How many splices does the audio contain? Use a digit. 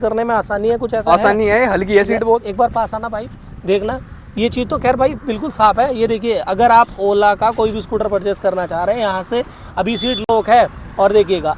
0